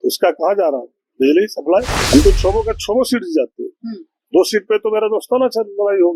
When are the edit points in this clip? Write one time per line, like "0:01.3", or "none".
0:02.0

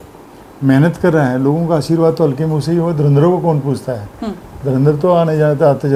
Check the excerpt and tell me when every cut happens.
none

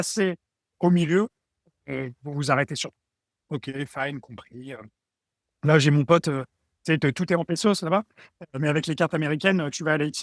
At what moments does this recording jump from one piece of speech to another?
none

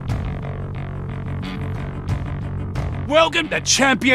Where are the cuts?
0:03.0

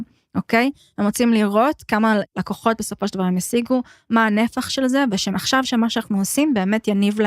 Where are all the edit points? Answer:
0:02.3
0:05.3

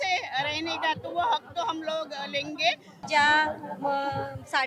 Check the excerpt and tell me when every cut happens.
0:03.1

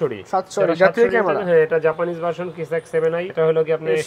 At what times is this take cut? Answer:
none

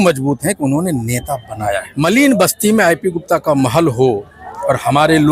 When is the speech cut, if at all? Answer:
0:01.9

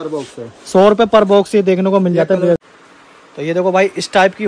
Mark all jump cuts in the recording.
0:02.6

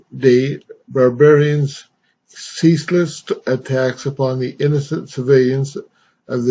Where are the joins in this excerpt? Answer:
0:04.0

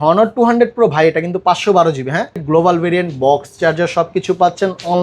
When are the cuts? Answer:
0:02.4

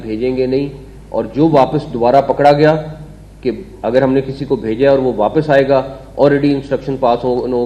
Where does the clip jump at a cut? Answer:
none

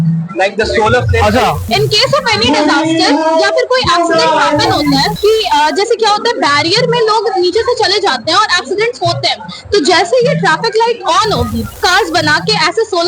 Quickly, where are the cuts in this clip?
0:01.7
0:05.1
0:11.8

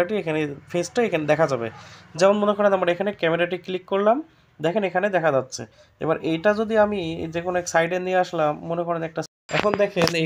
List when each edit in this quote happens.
0:09.3

